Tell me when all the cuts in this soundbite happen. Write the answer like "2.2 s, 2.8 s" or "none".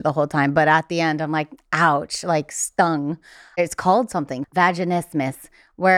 3.6 s, 4.4 s